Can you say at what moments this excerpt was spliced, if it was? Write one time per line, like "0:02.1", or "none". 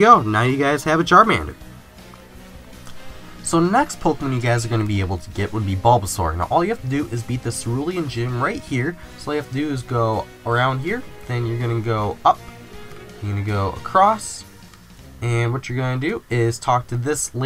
0:08.1